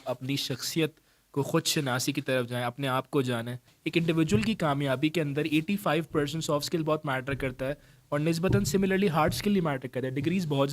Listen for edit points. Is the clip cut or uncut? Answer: cut